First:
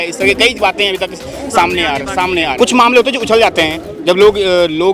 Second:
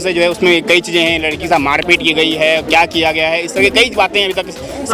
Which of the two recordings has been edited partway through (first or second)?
first